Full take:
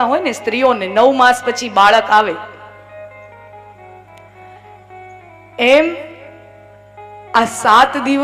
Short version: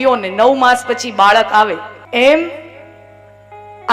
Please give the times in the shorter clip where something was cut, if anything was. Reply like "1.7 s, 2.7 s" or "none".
1.9 s